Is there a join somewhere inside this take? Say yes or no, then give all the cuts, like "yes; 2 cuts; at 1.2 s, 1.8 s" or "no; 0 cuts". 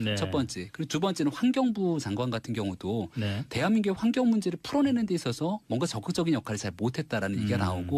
no; 0 cuts